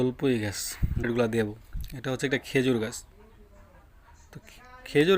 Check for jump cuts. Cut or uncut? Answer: cut